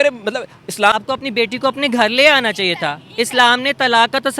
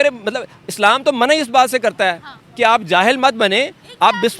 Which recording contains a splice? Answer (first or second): first